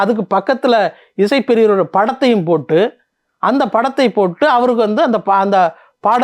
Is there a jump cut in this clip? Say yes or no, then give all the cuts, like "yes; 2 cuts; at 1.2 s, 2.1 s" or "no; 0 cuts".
no; 0 cuts